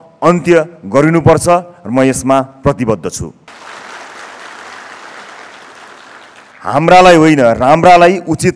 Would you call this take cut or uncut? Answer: cut